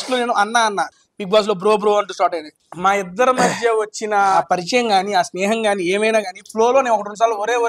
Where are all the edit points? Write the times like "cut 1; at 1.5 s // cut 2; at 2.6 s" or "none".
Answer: cut 1; at 0.9 s